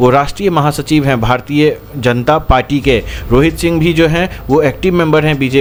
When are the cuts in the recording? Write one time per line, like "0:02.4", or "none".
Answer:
none